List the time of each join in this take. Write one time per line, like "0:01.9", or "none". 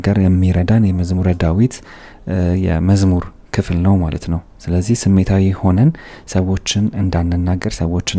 none